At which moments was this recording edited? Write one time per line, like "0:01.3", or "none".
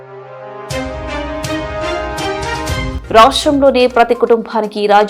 none